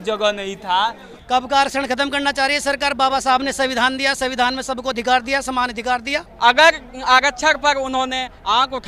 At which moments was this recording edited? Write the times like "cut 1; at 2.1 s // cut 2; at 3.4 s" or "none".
cut 1; at 1.1 s // cut 2; at 6.2 s